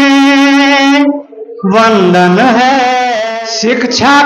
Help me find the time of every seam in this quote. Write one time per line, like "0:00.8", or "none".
0:03.2